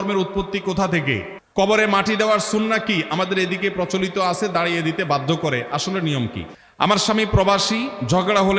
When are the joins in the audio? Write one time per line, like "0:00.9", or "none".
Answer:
0:01.4
0:06.4